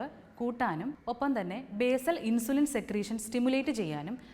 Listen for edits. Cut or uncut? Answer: cut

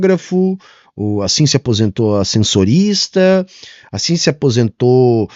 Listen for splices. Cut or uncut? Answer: uncut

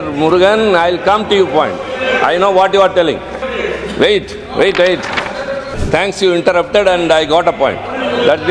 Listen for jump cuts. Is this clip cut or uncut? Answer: cut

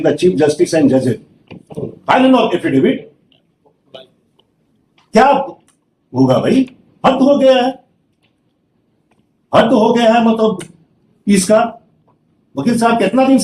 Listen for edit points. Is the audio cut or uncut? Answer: uncut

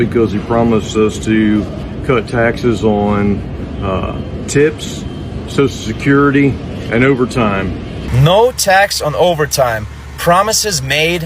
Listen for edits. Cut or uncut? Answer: cut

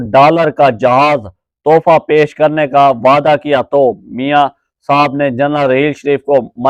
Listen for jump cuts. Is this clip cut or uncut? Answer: uncut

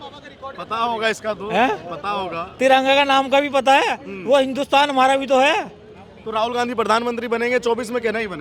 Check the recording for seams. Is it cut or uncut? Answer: uncut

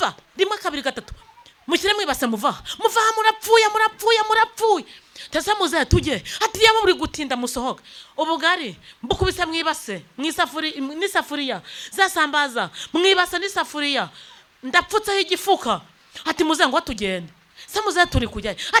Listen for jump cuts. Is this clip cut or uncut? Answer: uncut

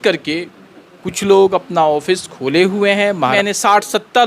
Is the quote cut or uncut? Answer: cut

